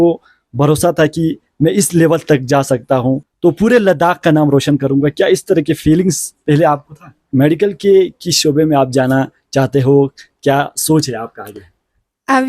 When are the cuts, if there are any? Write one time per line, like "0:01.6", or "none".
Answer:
0:03.3
0:07.2